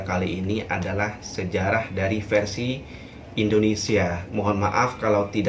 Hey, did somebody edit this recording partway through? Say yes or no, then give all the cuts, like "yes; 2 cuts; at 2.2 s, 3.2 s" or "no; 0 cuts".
yes; 1 cut; at 4.2 s